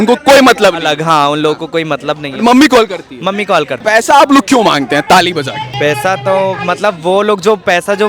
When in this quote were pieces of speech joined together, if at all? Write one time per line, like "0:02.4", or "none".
0:03.8
0:05.6